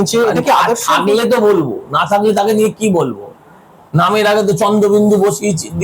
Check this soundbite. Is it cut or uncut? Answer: uncut